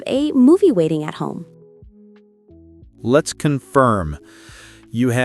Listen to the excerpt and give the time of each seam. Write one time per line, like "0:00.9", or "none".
0:01.4
0:03.0